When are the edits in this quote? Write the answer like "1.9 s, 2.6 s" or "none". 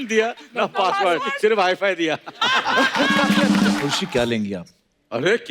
3.9 s